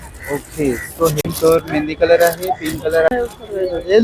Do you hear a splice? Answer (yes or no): yes